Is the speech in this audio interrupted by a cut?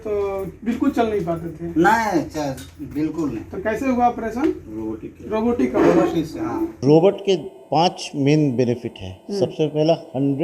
yes; 2 cuts; at 3.6 s, 6.8 s

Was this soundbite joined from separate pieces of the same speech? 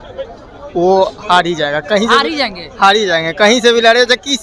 no; 0 cuts

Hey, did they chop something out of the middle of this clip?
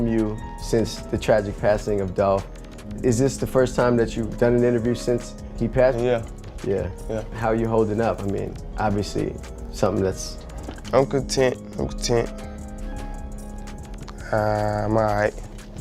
yes; 1 cut; at 7.4 s

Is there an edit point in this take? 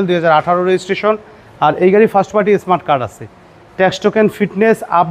no; 0 cuts

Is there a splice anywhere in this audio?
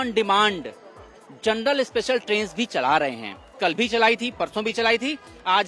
no; 0 cuts

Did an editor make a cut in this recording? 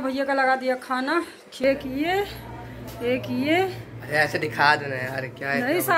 yes; 1 cut; at 1.5 s

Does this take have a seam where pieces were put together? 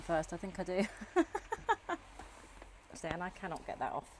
yes; 1 cut; at 3.0 s

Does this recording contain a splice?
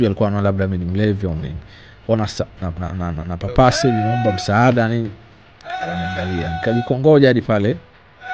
no; 0 cuts

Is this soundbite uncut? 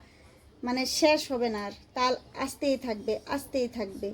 yes; 0 cuts

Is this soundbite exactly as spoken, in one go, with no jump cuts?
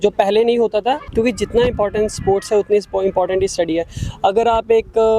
no; 1 cut; at 1.0 s

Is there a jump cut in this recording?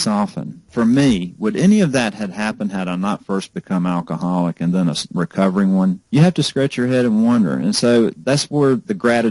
no; 0 cuts

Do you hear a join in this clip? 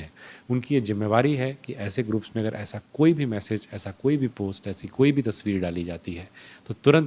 no; 0 cuts

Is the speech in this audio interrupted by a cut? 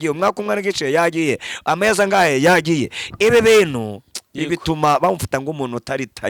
no; 0 cuts

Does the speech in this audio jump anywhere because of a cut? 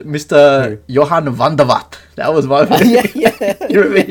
no; 0 cuts

